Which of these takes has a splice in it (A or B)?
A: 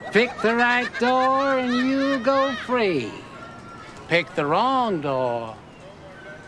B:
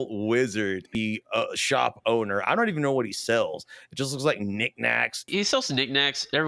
B